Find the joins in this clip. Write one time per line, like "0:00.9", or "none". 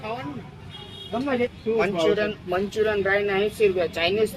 0:01.5